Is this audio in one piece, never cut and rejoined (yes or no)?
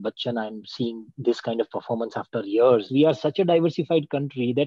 no